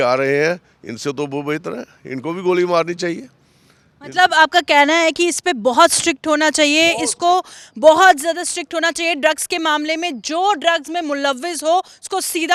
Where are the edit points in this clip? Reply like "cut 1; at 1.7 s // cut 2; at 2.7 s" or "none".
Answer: none